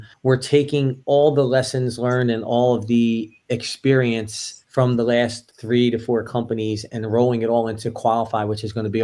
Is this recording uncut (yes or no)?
yes